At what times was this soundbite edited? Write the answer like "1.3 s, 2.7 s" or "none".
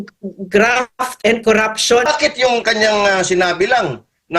2.1 s